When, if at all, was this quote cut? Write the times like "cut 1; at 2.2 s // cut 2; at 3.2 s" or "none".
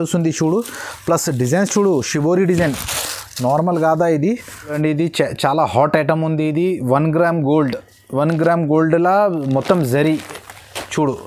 cut 1; at 4.8 s